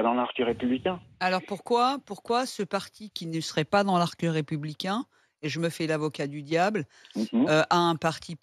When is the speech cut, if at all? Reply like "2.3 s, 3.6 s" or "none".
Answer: none